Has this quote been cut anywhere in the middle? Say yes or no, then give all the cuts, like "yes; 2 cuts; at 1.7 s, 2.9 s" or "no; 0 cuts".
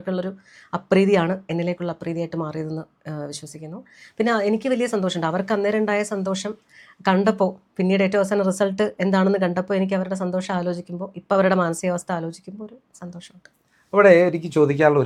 no; 0 cuts